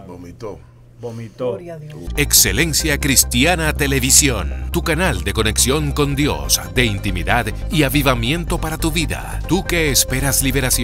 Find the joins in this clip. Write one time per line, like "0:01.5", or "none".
0:02.0